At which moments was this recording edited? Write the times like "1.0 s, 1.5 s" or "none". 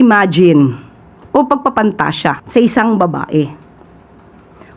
2.4 s